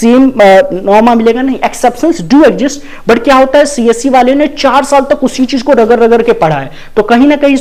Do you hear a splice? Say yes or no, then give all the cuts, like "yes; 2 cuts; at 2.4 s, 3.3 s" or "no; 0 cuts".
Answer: no; 0 cuts